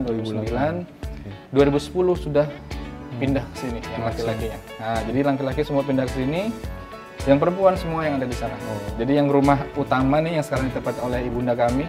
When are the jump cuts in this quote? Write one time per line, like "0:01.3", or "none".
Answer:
none